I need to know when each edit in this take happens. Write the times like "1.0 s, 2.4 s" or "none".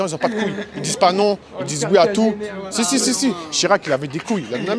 none